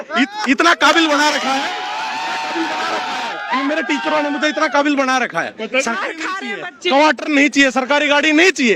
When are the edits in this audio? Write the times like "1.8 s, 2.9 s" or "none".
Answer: 6.0 s